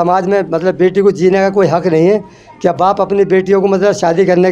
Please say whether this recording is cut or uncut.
uncut